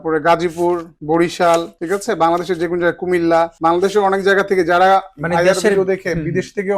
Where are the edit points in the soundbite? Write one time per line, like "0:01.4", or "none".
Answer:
0:00.9
0:01.7
0:03.5